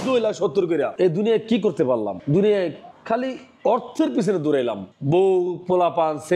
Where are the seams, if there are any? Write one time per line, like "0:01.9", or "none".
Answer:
0:00.9